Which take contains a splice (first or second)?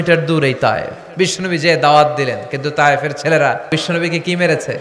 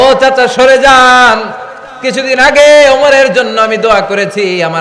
first